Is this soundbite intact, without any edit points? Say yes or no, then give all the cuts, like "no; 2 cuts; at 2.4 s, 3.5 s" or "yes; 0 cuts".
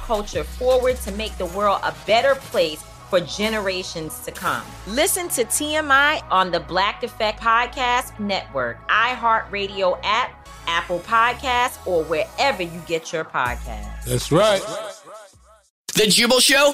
no; 1 cut; at 15.8 s